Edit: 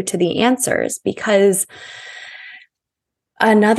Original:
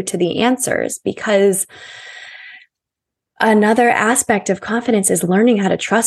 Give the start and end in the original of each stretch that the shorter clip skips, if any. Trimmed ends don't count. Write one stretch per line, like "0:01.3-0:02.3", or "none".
none